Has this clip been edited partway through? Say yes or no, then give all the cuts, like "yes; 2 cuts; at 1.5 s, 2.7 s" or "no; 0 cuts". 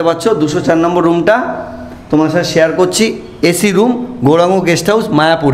no; 0 cuts